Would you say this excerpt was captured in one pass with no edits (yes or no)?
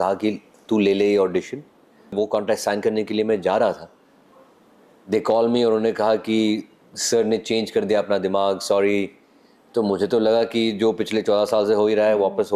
no